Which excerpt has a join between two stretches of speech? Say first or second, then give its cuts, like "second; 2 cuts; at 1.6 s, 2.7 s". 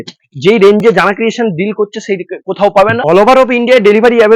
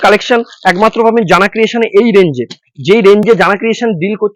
first; 1 cut; at 3.0 s